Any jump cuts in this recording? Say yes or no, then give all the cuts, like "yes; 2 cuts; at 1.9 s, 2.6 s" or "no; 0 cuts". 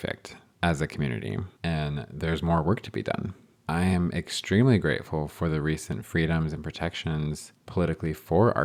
no; 0 cuts